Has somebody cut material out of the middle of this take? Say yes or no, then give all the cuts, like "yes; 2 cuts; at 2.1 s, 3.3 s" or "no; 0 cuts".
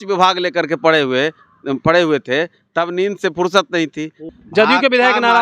yes; 1 cut; at 4.2 s